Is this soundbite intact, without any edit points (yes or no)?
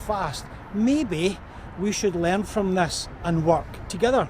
yes